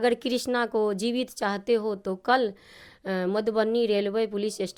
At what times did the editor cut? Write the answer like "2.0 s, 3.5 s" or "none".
none